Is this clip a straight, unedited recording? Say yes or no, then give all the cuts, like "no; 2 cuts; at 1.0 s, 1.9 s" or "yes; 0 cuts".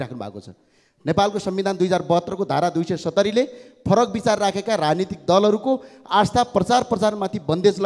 yes; 0 cuts